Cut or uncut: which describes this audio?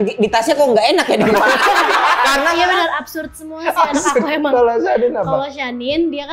cut